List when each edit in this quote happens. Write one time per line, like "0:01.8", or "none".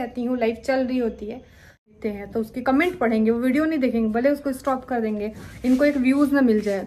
0:02.0